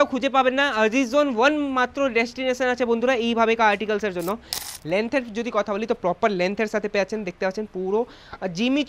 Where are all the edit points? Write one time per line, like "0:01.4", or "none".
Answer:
0:04.5